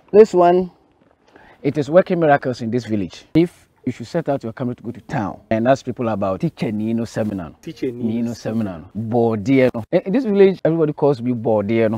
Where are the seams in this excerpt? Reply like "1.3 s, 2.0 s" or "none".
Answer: 3.2 s, 5.4 s, 6.4 s, 7.6 s, 8.9 s, 9.8 s, 10.6 s